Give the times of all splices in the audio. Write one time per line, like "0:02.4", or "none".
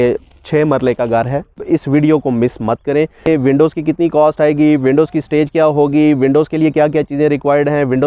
0:01.6
0:03.3